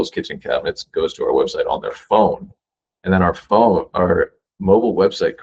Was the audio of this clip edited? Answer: no; 0 cuts

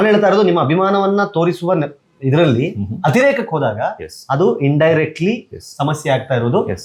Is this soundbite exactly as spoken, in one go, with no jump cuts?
yes; 0 cuts

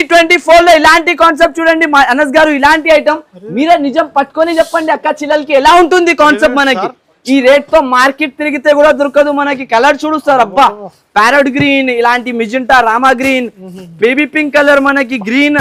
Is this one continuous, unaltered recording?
yes; 0 cuts

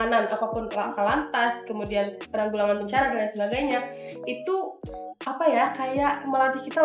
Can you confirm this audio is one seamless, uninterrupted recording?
yes; 0 cuts

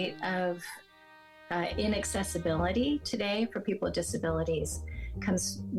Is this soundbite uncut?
yes; 0 cuts

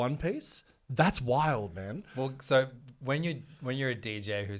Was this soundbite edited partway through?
no; 0 cuts

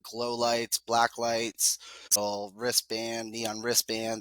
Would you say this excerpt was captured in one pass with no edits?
no; 1 cut; at 2.2 s

